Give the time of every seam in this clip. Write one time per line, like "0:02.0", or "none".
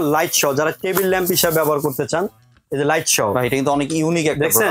none